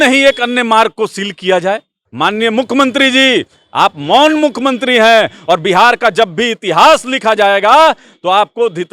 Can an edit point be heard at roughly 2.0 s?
yes; 1 cut; at 2.0 s

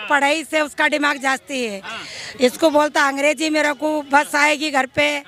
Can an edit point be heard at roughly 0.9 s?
no; 0 cuts

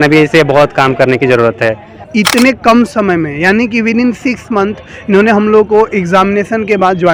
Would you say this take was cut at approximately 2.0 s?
yes; 1 cut; at 2.0 s

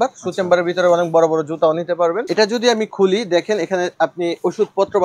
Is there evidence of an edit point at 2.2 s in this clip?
yes; 1 cut; at 2.2 s

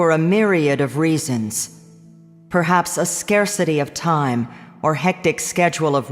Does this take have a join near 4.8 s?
no; 1 cut; at 1.3 s

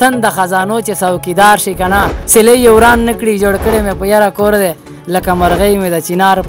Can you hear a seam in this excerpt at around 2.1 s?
yes; 1 cut; at 2.1 s

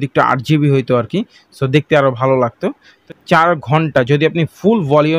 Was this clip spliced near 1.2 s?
no; 1 cut; at 3.0 s

